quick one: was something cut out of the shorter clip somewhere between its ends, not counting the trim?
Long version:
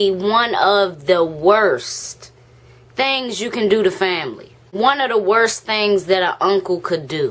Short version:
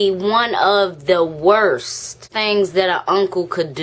yes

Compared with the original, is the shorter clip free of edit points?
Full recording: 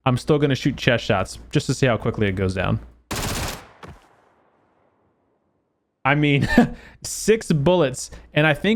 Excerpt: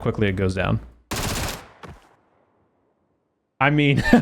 no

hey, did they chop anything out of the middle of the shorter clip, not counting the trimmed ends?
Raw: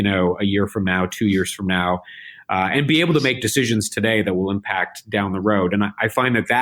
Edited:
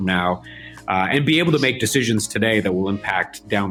no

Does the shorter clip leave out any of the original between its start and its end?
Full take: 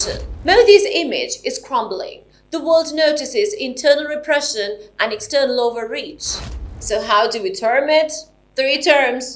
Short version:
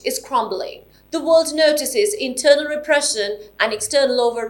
no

